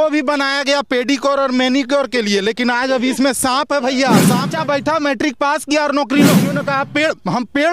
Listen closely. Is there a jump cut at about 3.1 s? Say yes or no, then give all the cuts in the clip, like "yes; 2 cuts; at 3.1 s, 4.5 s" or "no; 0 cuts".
no; 2 cuts; at 4.5 s, 6.6 s